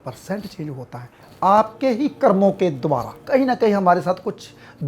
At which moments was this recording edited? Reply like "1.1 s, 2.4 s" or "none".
3.2 s